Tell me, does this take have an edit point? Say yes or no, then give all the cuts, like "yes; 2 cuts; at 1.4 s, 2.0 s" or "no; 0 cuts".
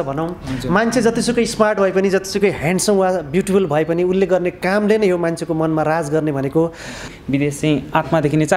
yes; 1 cut; at 7.1 s